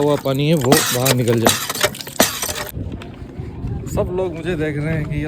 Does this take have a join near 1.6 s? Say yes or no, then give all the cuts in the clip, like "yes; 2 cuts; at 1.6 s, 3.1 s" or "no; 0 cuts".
no; 1 cut; at 2.8 s